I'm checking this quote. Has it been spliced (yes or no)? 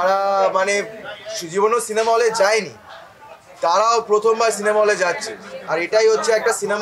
no